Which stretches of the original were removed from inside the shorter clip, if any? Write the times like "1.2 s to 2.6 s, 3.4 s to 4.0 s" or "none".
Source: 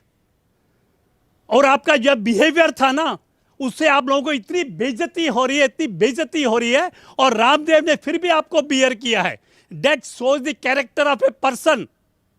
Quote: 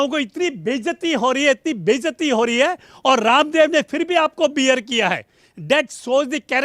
none